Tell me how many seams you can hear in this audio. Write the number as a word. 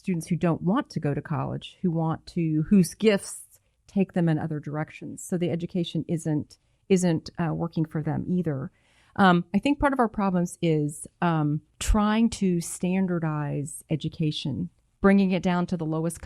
two